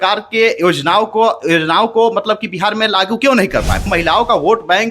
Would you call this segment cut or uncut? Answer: cut